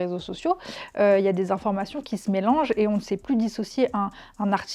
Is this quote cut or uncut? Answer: uncut